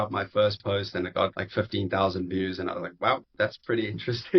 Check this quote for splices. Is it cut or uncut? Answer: cut